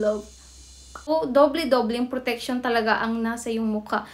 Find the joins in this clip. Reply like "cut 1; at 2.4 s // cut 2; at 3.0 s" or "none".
cut 1; at 1.1 s

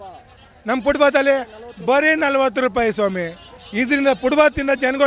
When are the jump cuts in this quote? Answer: cut 1; at 3.6 s

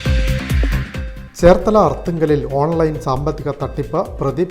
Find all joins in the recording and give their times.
cut 1; at 0.9 s

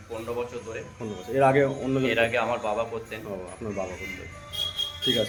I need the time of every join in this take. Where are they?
none

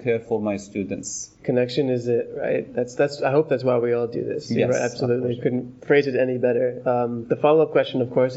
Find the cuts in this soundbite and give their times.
none

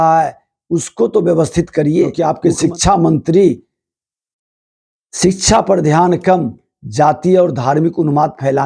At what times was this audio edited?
cut 1; at 2.2 s

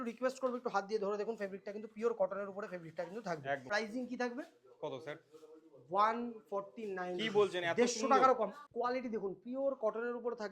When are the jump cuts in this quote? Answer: cut 1; at 3.6 s // cut 2; at 8.6 s

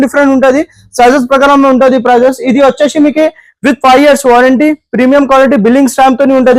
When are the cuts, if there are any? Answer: none

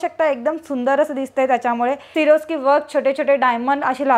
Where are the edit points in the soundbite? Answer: cut 1; at 2.0 s

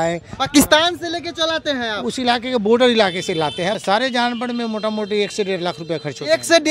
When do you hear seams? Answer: cut 1; at 3.8 s

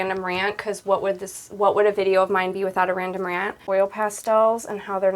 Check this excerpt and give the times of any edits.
cut 1; at 3.6 s

